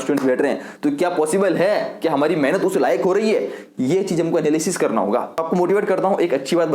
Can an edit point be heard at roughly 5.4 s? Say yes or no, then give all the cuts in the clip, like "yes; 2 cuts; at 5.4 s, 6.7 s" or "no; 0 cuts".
yes; 1 cut; at 5.4 s